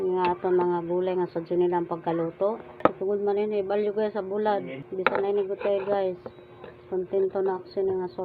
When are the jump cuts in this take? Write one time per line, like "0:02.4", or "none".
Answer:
0:02.7
0:04.8